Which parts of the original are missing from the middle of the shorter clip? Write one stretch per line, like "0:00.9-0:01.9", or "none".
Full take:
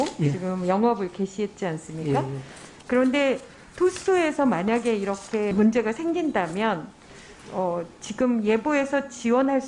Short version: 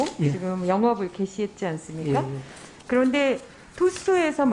none